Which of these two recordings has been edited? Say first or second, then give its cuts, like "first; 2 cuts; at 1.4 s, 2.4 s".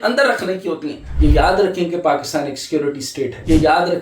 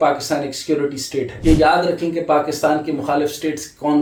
first; 1 cut; at 1.1 s